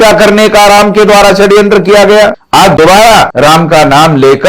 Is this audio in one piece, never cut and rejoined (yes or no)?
no